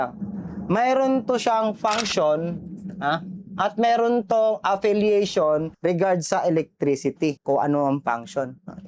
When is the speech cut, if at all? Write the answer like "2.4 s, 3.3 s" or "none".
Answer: none